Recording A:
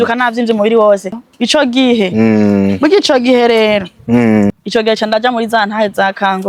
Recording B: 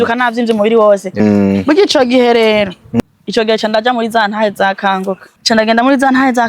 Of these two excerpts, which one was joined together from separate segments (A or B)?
B